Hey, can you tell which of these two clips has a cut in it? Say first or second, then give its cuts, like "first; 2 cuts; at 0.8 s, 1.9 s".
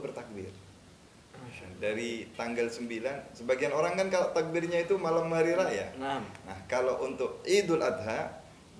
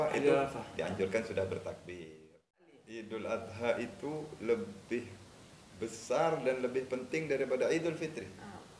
second; 1 cut; at 2.8 s